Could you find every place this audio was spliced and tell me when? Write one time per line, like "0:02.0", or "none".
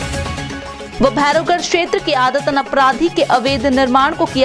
0:00.9